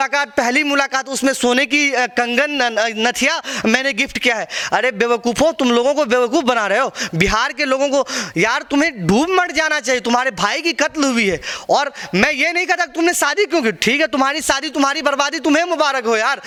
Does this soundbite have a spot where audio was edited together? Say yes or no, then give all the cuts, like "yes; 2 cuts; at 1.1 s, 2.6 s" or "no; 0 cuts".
no; 0 cuts